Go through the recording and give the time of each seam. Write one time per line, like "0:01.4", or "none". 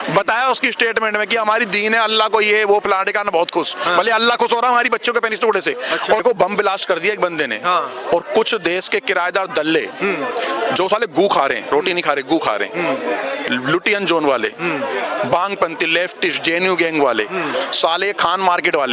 0:06.2